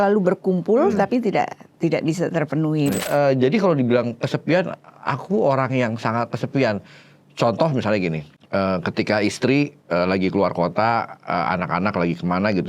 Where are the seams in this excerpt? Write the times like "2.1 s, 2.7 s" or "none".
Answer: 3.1 s, 8.3 s